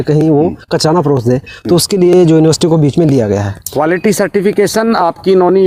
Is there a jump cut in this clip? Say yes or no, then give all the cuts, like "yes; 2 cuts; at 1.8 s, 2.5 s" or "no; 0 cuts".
no; 0 cuts